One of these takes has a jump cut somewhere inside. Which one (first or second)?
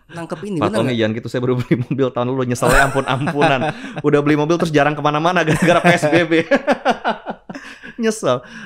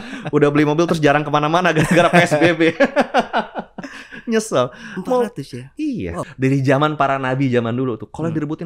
second